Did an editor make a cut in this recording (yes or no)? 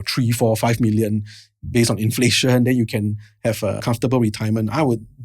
yes